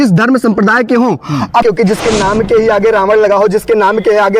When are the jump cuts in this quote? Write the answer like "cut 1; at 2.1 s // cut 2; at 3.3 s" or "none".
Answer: cut 1; at 1.6 s